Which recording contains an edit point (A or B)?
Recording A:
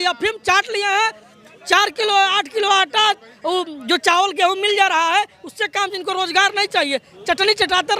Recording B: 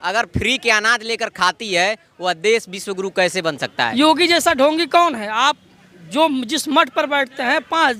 B